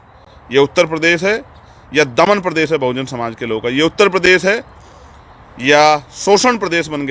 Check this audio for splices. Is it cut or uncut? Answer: uncut